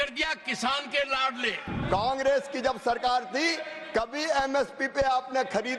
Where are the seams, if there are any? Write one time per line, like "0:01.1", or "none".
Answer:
0:01.7